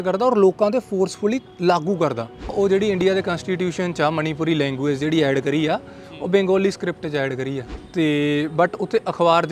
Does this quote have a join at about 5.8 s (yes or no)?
no